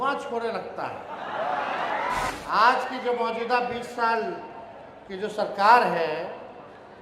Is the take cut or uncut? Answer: cut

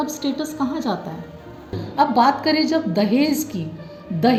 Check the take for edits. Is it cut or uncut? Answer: uncut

